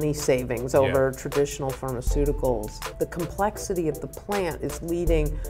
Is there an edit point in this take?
yes; 1 cut; at 2.9 s

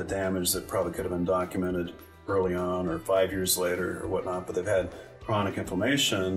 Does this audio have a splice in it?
no; 0 cuts

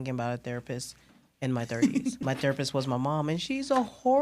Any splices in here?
yes; 1 cut; at 2.2 s

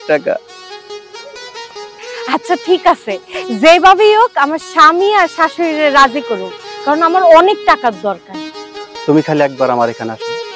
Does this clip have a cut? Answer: no; 0 cuts

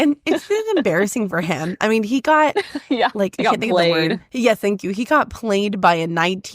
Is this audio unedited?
no; 1 cut; at 4.3 s

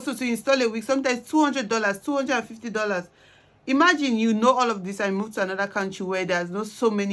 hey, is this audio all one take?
yes; 0 cuts

